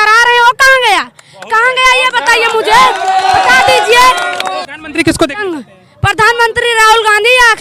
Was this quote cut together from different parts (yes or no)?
yes